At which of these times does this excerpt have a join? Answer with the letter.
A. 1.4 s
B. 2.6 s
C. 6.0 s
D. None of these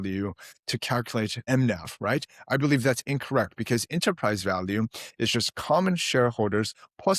A